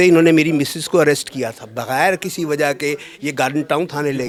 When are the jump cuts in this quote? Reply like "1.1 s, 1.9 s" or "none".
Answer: none